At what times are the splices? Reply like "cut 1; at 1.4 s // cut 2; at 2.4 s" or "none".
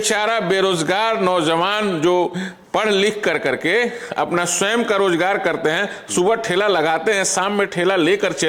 none